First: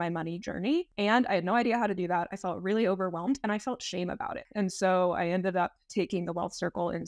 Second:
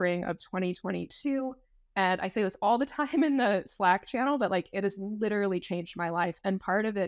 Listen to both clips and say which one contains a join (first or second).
first